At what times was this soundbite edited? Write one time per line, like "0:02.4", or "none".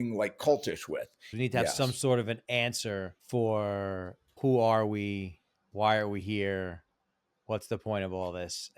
0:01.3
0:03.2
0:04.4